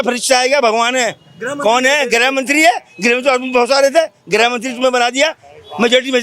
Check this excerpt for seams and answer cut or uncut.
uncut